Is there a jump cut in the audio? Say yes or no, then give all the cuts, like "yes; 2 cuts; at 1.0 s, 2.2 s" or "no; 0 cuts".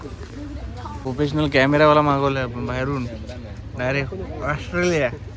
yes; 1 cut; at 1.1 s